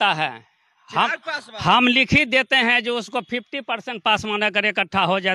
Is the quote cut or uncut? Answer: uncut